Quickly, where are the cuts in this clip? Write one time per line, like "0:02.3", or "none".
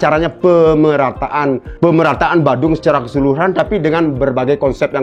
0:01.7